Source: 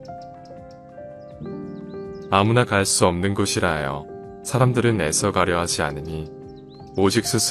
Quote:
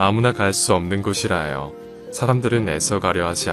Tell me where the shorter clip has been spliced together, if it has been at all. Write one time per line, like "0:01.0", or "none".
none